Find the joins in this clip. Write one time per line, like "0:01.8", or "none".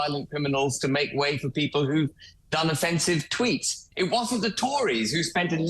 0:03.9

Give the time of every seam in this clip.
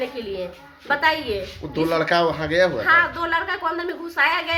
none

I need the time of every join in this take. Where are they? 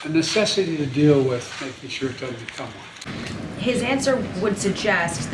0:03.1

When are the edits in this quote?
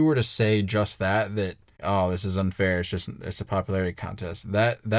0:01.7

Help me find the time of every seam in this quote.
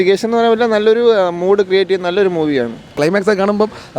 0:03.0

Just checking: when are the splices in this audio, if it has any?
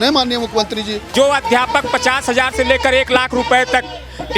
0:01.1

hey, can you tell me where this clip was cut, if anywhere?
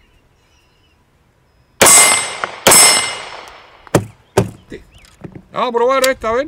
0:04.7

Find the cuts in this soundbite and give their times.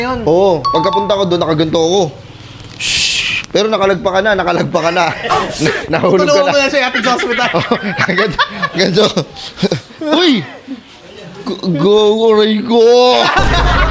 none

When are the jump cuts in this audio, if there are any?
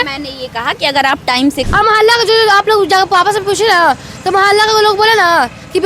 0:01.6

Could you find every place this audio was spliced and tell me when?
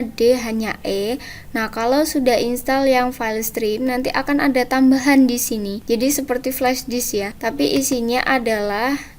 0:05.8
0:07.3

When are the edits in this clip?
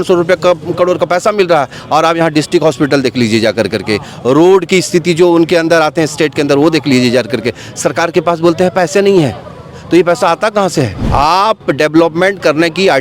0:11.0

